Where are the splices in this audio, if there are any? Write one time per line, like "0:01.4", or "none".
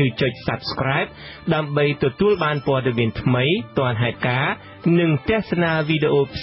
none